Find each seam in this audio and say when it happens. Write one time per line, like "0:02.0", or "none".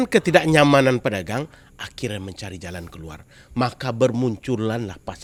none